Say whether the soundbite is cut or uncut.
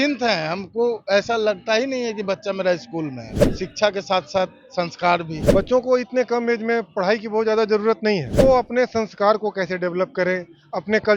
cut